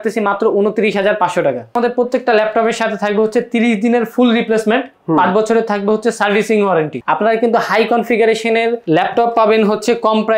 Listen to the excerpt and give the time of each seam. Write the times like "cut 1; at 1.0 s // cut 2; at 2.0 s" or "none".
cut 1; at 1.7 s // cut 2; at 6.9 s